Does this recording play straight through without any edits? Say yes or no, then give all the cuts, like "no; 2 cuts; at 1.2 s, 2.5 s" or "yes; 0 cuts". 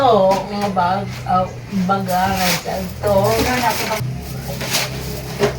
no; 1 cut; at 4.1 s